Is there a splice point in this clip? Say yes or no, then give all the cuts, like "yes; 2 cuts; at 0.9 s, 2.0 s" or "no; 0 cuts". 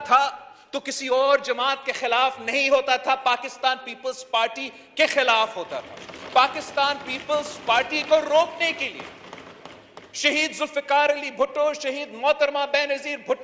no; 0 cuts